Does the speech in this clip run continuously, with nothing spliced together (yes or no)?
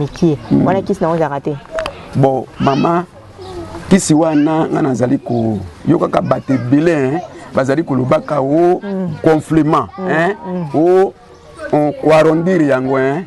yes